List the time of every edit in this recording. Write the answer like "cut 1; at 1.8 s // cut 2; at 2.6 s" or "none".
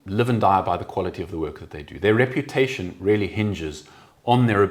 none